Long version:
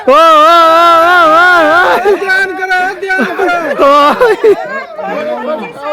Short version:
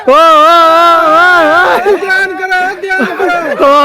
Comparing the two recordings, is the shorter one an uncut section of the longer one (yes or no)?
no